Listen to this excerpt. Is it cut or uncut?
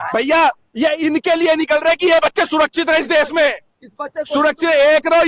uncut